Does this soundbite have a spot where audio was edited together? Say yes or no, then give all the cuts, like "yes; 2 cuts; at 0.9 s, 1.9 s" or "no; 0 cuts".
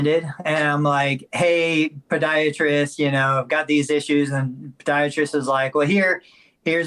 no; 0 cuts